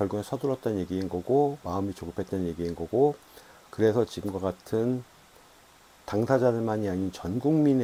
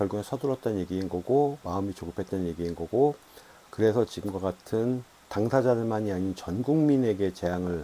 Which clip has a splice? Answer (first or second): second